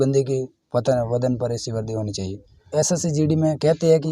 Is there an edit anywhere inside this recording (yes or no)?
yes